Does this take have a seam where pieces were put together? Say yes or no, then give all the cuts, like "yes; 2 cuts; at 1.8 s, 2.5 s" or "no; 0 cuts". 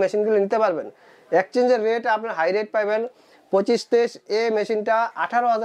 no; 0 cuts